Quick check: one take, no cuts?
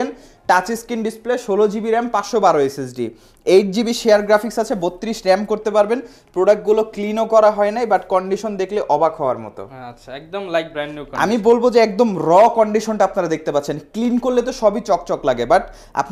yes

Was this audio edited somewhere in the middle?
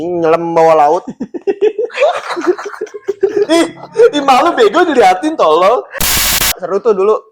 yes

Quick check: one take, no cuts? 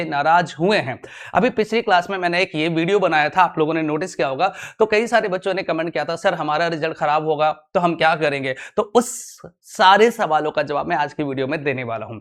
yes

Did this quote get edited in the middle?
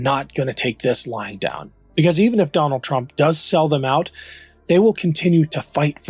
no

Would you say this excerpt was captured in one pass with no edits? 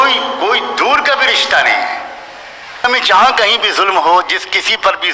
no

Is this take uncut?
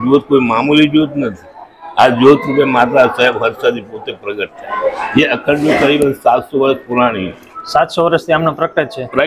no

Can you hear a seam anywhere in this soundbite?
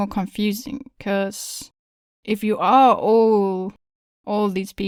no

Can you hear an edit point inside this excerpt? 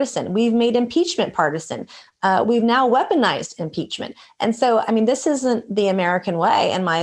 no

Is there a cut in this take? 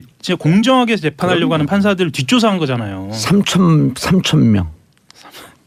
no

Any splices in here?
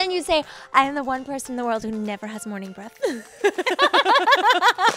no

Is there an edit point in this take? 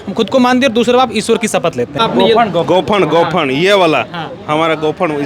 yes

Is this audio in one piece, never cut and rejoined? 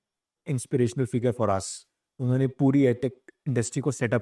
yes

